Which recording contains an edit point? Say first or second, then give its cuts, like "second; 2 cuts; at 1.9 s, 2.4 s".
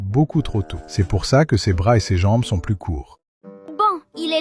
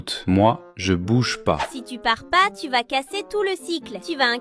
first; 1 cut; at 3.3 s